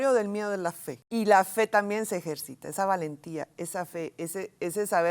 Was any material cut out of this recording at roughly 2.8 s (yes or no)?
no